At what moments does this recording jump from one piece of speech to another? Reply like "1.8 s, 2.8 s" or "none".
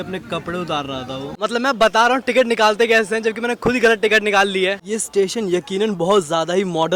1.4 s, 4.8 s